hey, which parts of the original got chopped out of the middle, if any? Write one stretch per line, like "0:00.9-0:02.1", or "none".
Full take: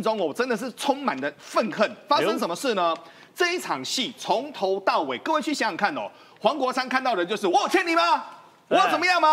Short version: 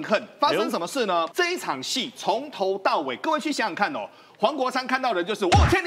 0:03.0-0:03.3